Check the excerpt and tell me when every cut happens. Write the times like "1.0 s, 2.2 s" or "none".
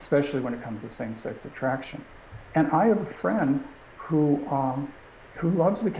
none